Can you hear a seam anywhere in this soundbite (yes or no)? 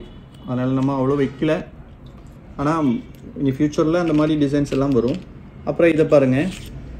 no